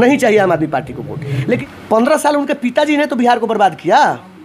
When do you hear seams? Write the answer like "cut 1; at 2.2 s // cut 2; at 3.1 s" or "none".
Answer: cut 1; at 1.6 s